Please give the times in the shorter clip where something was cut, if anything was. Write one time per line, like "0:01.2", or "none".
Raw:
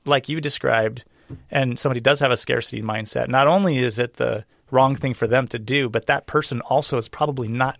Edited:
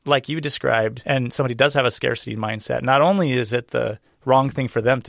0:01.0